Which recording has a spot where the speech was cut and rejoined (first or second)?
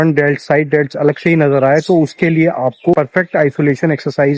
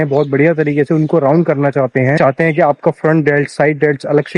second